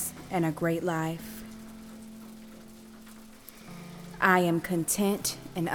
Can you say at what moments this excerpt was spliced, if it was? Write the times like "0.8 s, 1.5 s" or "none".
1.2 s, 4.2 s

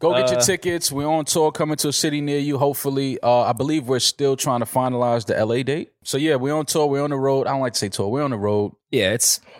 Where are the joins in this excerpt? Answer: 6.0 s

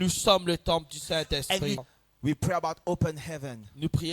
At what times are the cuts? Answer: 1.8 s

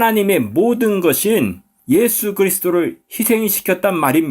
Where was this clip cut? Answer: 1.7 s

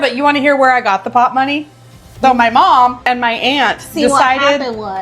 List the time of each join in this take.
2.2 s, 3.0 s

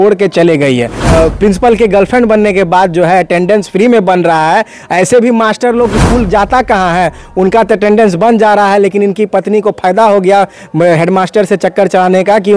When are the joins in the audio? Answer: 1.0 s

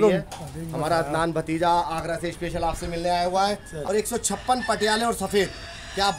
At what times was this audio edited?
3.7 s

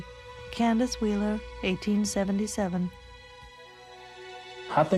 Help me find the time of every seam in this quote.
2.9 s

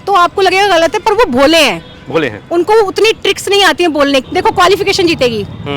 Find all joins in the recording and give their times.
4.3 s

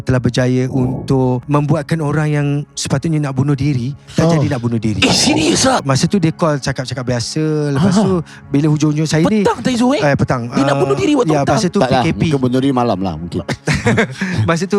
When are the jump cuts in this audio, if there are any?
1.4 s, 5.8 s

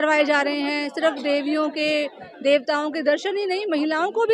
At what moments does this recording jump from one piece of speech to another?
none

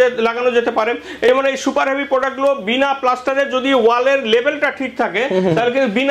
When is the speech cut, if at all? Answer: none

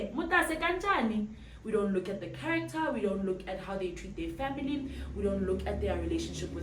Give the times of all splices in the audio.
none

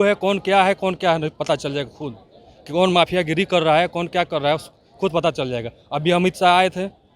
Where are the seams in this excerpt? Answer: none

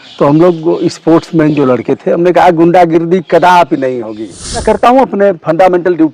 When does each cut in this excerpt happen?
4.6 s

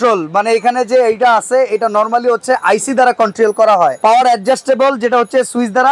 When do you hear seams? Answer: none

